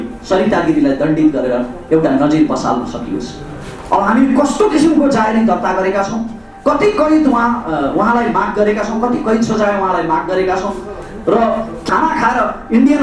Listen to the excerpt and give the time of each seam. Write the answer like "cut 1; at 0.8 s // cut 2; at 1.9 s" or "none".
cut 1; at 11.8 s